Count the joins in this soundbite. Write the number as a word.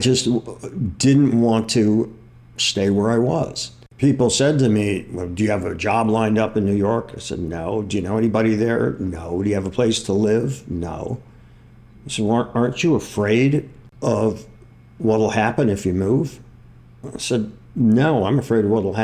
two